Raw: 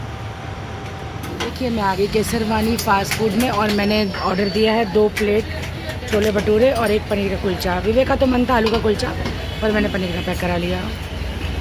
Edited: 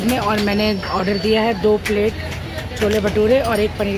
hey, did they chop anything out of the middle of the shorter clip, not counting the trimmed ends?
no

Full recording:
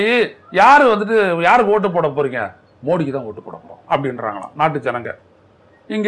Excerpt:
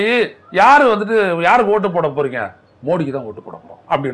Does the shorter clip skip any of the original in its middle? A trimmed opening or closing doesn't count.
no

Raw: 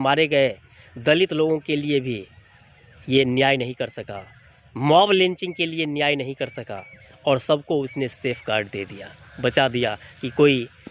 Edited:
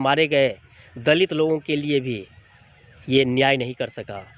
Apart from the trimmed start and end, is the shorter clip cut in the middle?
no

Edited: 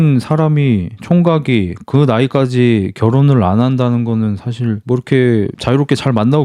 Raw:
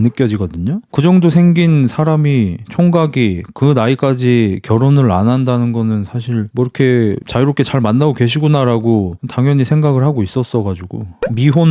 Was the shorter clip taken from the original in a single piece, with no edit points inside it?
yes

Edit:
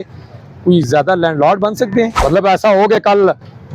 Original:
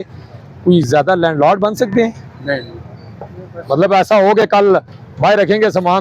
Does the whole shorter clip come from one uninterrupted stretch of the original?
no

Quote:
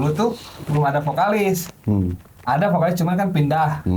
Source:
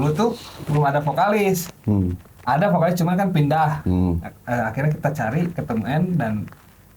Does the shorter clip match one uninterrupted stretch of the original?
yes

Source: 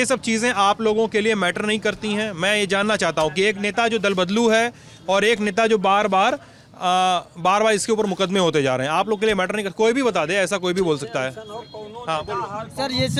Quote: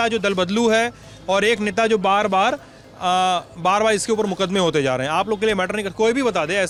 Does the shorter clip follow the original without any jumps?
yes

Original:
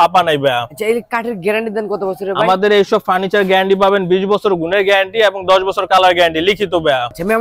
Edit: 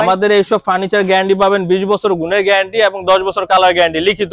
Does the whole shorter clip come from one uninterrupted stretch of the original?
yes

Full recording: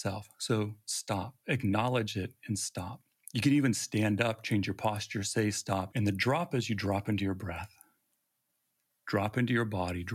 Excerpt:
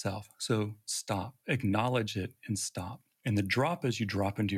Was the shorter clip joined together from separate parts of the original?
yes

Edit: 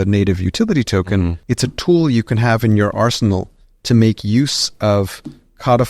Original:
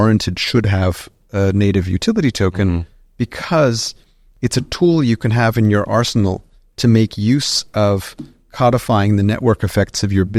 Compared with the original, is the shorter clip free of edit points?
no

